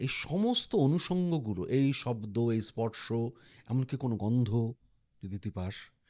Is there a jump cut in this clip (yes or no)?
no